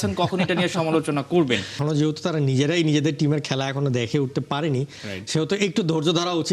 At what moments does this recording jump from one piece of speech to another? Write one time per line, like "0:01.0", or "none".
0:01.7